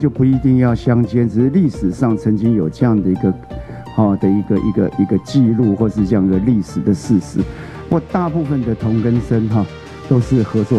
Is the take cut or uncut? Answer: uncut